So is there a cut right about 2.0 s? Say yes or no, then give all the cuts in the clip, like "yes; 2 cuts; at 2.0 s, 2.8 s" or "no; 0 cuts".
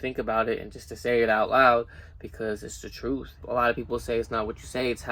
no; 1 cut; at 3.3 s